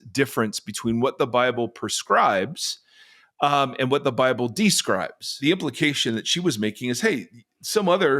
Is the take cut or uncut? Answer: cut